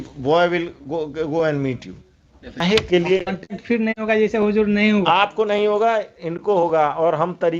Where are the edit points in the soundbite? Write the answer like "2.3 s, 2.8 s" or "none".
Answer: 2.6 s